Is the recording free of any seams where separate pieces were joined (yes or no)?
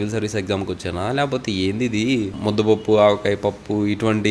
no